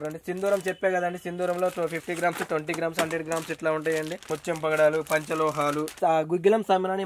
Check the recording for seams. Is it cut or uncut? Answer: cut